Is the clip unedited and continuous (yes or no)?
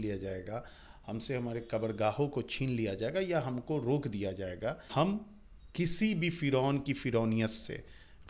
no